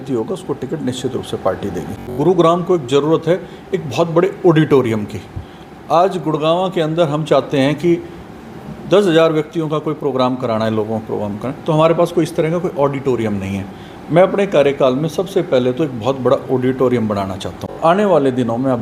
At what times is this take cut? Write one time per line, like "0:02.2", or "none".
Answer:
0:02.2
0:17.8